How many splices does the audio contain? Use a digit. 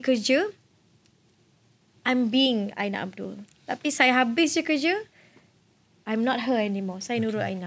0